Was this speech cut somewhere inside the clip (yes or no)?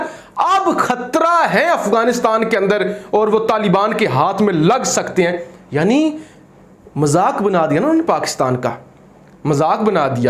no